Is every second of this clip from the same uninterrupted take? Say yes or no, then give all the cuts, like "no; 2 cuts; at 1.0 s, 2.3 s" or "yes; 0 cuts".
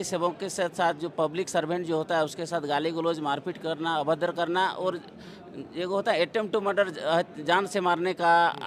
yes; 0 cuts